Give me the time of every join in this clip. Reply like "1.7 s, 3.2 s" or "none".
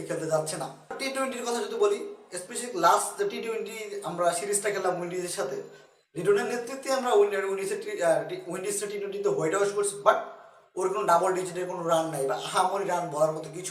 1.0 s